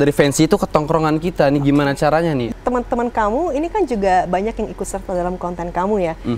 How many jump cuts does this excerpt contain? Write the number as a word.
one